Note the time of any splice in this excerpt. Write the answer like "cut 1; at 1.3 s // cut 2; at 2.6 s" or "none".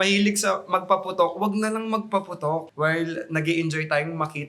cut 1; at 2.7 s